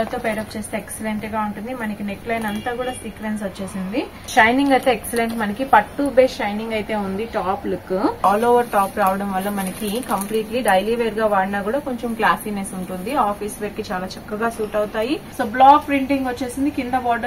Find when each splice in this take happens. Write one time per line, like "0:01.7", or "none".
0:04.3
0:08.2
0:15.3